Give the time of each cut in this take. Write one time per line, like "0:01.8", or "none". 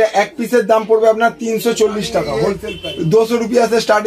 0:02.7